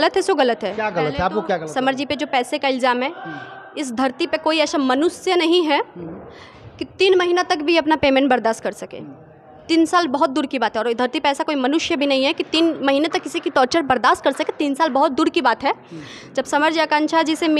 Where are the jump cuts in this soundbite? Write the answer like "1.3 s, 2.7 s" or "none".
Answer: none